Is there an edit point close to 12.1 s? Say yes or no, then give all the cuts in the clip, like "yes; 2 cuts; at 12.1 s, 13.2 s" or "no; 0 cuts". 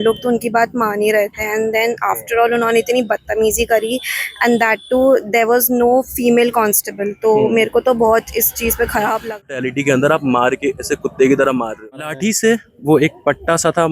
yes; 2 cuts; at 9.5 s, 12.1 s